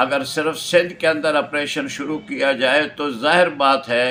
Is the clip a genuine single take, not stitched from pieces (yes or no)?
yes